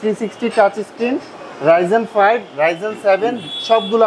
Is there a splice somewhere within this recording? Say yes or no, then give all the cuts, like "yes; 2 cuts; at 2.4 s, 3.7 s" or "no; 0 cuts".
no; 0 cuts